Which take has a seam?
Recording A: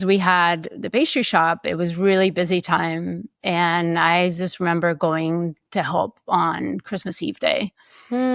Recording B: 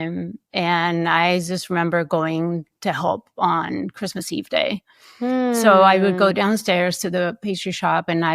B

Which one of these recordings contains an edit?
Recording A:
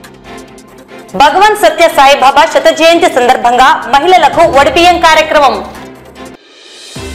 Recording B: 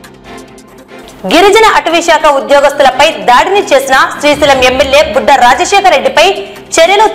B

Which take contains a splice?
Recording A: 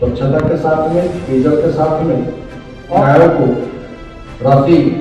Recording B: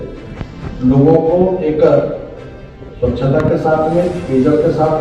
A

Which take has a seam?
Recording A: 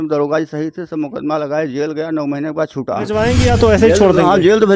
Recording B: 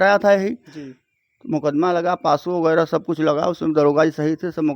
A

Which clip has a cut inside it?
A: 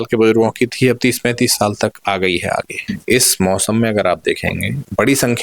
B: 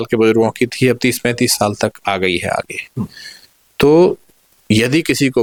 A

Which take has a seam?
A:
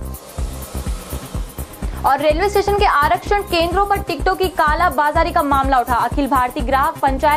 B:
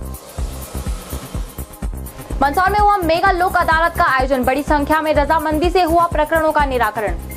B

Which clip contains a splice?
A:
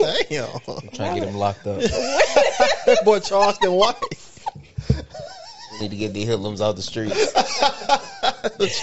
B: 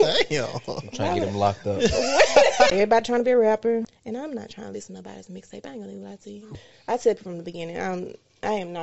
B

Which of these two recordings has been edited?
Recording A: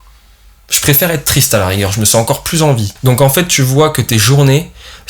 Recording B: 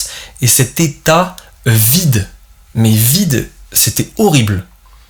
A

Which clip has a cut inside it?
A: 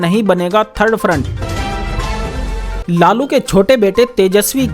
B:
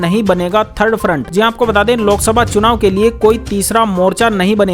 A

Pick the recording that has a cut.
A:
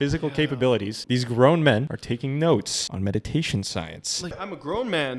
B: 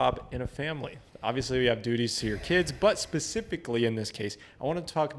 A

